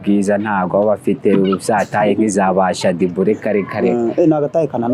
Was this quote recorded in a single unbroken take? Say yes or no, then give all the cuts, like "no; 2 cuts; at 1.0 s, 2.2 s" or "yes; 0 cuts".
yes; 0 cuts